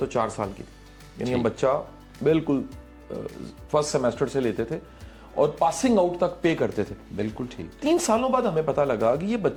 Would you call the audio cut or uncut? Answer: uncut